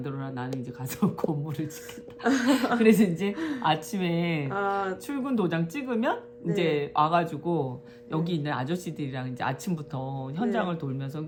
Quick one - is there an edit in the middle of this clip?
no; 0 cuts

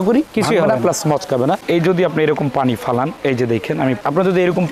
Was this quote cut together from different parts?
yes; 2 cuts; at 1.6 s, 4.0 s

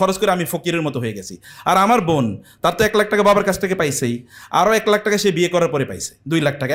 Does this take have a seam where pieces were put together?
no; 0 cuts

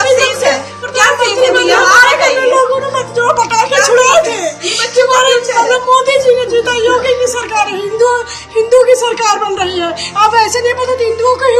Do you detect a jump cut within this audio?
no; 0 cuts

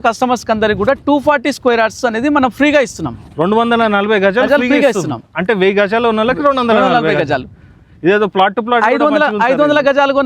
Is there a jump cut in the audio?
no; 0 cuts

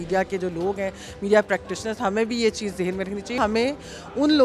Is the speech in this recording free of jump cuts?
no; 1 cut; at 3.4 s

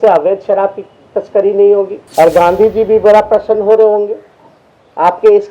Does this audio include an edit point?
yes; 1 cut; at 2.0 s

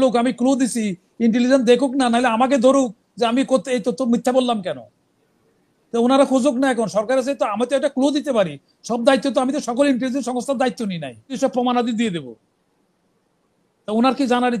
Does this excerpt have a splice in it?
yes; 1 cut; at 11.4 s

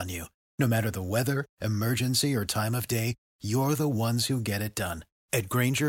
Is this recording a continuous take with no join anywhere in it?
yes; 0 cuts

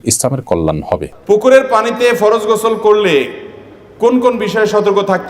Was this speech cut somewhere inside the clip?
yes; 1 cut; at 1.1 s

